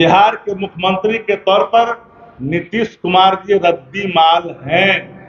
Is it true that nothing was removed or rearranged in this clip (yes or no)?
yes